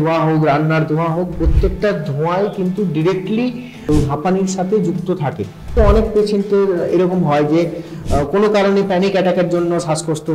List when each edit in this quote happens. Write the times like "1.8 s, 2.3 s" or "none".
3.9 s, 5.7 s

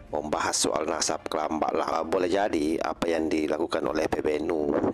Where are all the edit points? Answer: 1.9 s

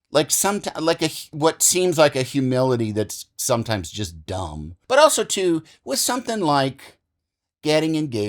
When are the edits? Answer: 4.7 s

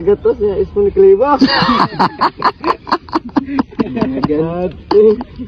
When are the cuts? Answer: none

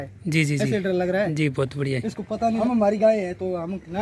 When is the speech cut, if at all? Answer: 2.6 s

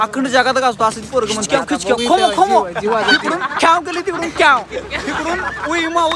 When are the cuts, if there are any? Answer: 1.4 s

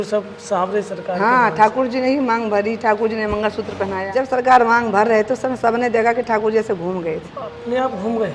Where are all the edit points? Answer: 4.1 s

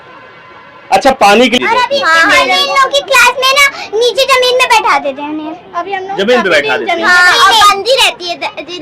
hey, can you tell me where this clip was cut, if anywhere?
1.6 s

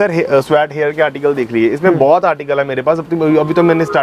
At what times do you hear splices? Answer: none

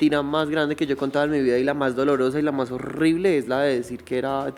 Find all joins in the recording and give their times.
none

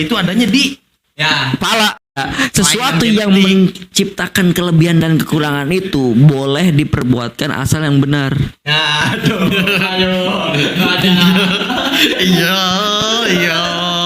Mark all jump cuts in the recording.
2.1 s

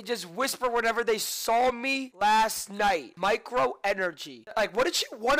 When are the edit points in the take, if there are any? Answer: 2.0 s, 3.1 s, 4.4 s

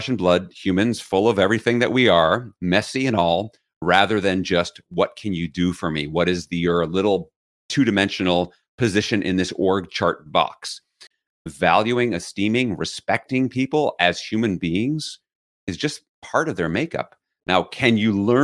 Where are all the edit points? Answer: 11.1 s

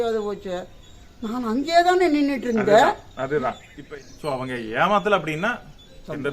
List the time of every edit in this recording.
3.7 s

